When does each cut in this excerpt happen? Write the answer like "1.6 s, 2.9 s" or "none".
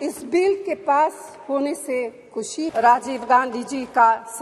2.7 s